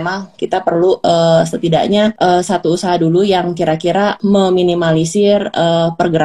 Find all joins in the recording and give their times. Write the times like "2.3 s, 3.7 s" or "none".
1.0 s, 2.2 s, 4.2 s